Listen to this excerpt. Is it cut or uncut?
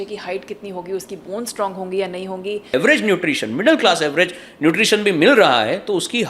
cut